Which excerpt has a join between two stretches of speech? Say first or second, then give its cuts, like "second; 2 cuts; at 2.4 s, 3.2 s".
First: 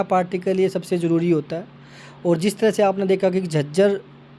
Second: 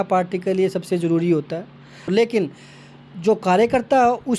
second; 1 cut; at 2.1 s